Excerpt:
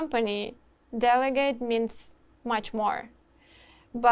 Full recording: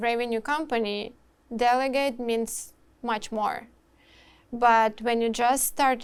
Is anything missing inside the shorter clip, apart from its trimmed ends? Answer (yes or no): no